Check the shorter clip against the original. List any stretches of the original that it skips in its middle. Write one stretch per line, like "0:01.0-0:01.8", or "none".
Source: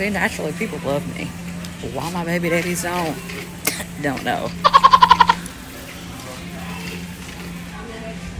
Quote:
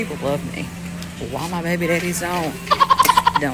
0:03.2-0:04.5